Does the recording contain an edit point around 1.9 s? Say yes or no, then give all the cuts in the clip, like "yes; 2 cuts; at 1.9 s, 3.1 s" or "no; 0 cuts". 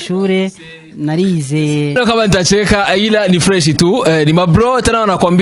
yes; 1 cut; at 1.9 s